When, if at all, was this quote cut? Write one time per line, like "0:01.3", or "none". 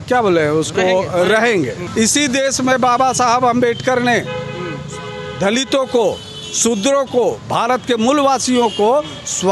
0:01.8